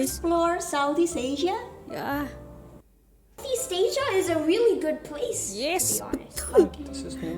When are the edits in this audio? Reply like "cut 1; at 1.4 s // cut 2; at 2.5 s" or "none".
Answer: cut 1; at 3.4 s